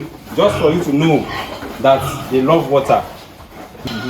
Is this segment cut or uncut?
uncut